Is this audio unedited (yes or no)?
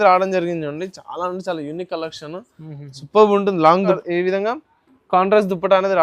no